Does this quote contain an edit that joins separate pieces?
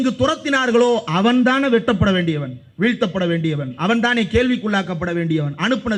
no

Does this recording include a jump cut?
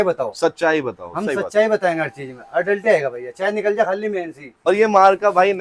yes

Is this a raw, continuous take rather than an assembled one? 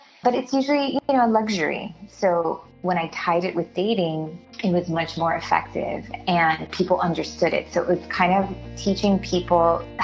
yes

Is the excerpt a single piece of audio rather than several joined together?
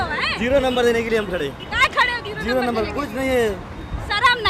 yes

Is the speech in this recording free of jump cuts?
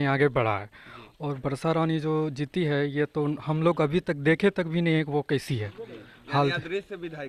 yes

